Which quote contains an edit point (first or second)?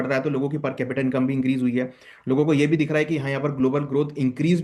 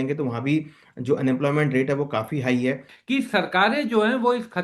second